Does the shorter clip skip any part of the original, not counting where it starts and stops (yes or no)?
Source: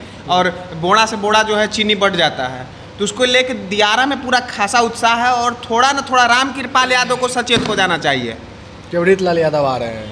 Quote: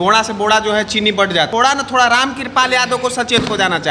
yes